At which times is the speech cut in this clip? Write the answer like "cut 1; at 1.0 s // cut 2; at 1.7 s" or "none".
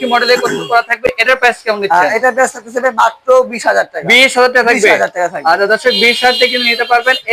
none